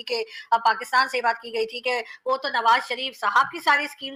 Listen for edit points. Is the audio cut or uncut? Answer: uncut